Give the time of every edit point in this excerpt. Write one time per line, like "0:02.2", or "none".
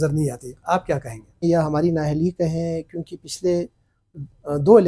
0:01.4